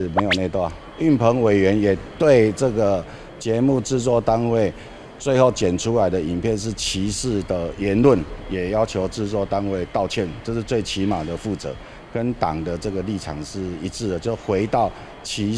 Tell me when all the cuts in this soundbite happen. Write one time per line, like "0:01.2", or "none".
none